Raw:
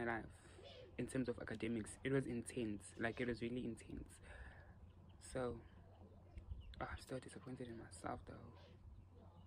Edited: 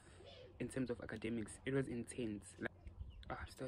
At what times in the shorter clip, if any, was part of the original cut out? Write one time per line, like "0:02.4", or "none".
0:02.7